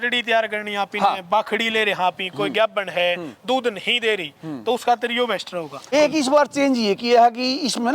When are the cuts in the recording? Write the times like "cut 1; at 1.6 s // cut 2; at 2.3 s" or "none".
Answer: cut 1; at 5.9 s